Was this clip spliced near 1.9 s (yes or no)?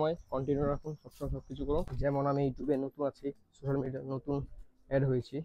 yes